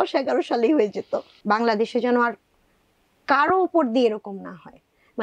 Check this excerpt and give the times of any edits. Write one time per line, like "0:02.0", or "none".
0:01.3